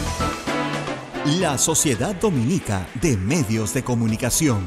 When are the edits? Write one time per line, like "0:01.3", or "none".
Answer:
0:01.0